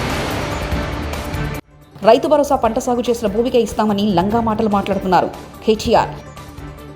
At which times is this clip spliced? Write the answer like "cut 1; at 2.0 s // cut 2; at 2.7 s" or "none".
cut 1; at 1.8 s